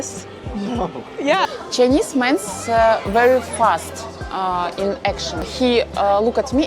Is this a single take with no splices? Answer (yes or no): no